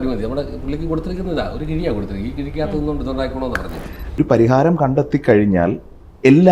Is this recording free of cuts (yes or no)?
no